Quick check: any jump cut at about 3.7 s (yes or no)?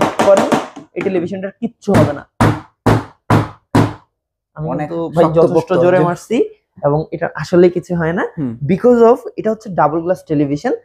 no